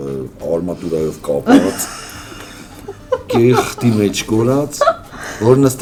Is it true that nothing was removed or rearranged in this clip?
yes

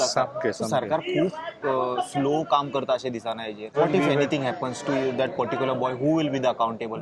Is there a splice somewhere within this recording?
yes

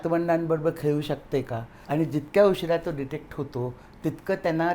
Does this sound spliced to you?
yes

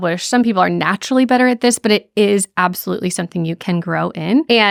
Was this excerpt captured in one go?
yes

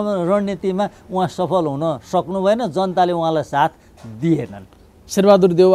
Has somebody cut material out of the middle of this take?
no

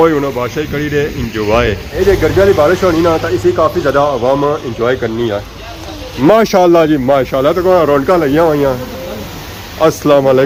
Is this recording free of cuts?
yes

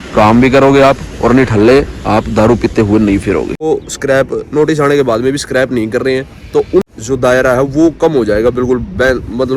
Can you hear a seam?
yes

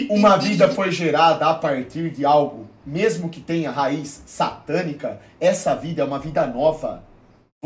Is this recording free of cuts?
yes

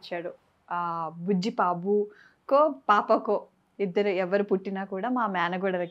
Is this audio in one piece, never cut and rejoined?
yes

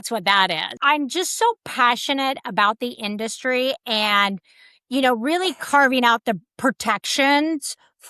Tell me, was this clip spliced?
no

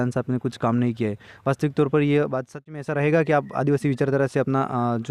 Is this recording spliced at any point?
yes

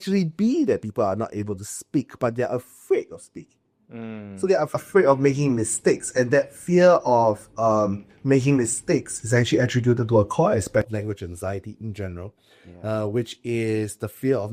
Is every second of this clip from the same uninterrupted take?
yes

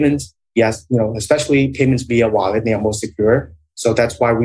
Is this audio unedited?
yes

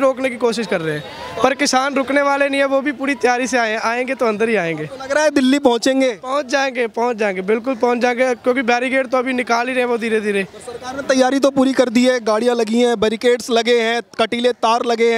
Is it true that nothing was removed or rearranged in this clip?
yes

